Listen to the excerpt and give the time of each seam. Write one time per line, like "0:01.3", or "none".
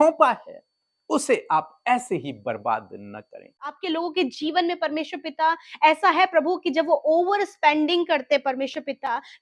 0:03.8

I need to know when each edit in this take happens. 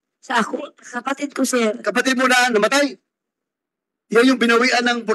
0:02.6

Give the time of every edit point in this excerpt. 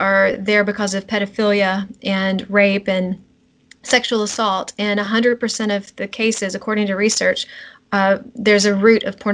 none

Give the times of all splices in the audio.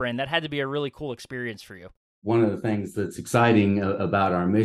0:02.2

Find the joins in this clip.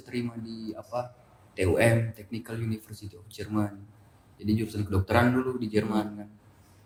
none

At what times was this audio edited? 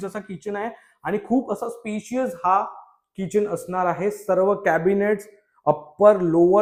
none

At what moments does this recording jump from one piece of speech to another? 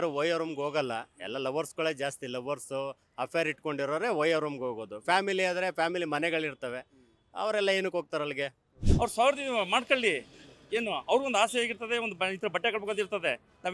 0:08.9

